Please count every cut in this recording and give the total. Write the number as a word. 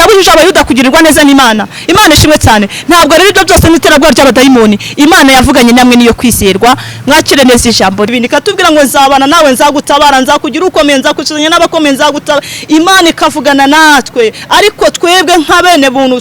one